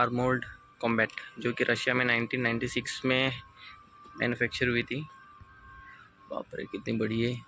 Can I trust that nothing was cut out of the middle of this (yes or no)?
yes